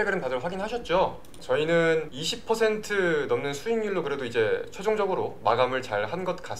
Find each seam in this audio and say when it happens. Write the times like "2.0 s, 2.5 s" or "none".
1.4 s